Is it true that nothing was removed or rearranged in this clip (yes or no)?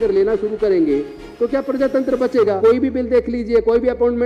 no